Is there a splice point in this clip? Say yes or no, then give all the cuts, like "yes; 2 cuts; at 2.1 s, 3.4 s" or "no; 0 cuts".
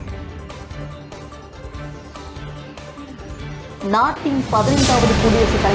yes; 1 cut; at 1.3 s